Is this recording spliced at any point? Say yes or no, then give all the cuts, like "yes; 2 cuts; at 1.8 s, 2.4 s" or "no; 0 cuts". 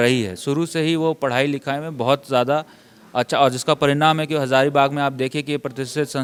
no; 0 cuts